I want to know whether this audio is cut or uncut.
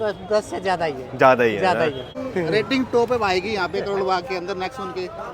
cut